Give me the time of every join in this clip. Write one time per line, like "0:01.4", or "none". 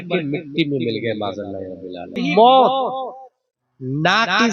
0:02.2